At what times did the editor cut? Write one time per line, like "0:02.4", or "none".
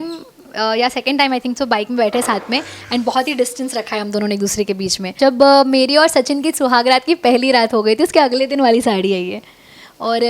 0:05.1